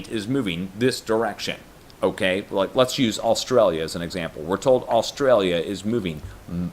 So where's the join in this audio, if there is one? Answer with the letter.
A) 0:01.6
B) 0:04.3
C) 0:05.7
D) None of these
A